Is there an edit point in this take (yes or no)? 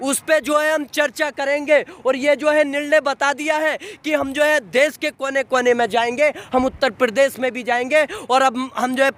no